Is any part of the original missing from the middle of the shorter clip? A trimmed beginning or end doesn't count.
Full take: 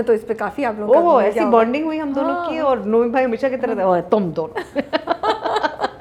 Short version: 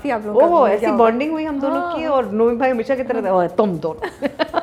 no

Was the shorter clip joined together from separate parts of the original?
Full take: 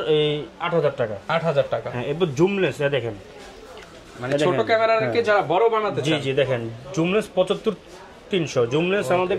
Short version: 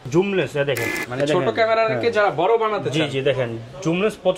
yes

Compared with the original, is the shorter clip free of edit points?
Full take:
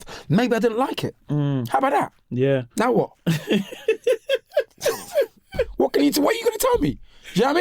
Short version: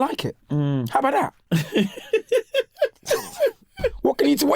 no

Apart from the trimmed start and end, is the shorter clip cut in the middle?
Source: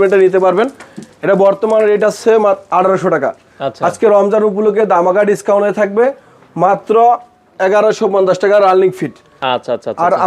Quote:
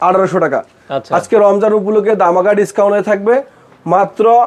no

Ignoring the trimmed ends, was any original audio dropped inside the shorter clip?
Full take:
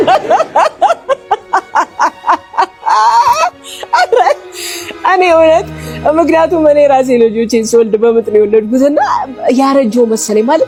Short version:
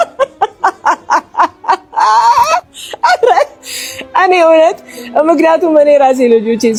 no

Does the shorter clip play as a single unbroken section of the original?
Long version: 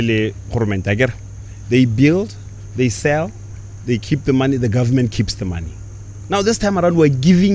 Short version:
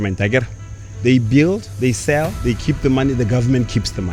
no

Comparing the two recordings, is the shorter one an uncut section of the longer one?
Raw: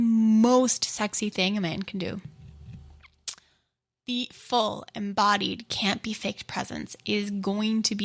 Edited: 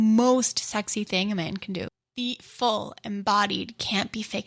no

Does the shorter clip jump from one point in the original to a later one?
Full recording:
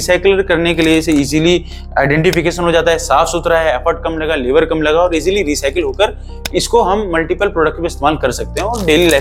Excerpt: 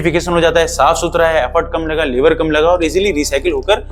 no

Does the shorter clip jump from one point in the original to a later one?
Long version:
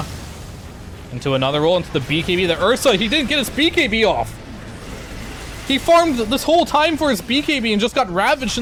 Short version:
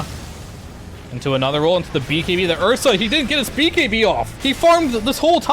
yes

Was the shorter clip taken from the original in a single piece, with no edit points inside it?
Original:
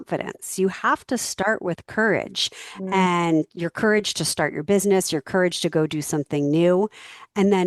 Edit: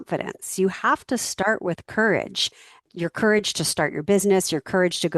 no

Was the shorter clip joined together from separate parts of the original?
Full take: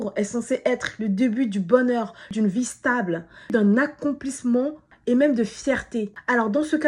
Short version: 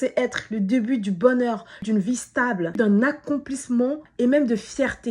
yes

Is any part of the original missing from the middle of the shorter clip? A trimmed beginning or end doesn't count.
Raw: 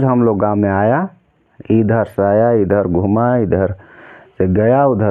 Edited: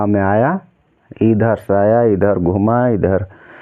no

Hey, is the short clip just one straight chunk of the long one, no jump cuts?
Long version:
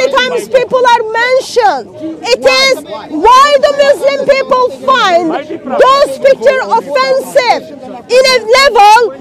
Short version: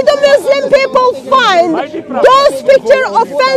yes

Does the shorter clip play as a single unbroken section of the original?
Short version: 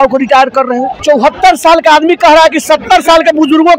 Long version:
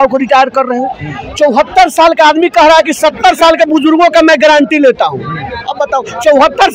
no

